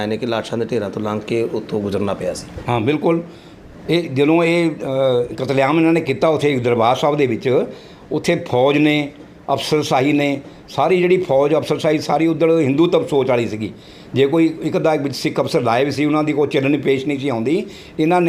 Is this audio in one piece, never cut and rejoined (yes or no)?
yes